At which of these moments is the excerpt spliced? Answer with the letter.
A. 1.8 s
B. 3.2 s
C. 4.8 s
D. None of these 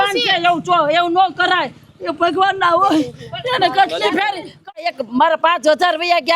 C